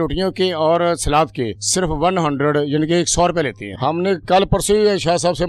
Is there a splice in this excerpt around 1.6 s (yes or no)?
yes